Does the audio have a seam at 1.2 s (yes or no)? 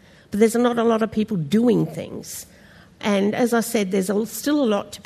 no